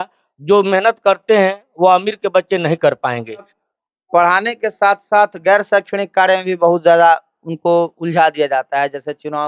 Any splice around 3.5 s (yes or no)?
yes